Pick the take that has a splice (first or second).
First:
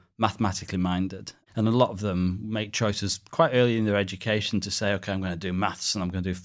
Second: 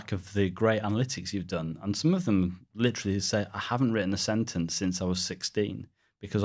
second